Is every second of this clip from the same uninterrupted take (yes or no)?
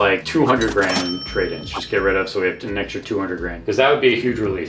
yes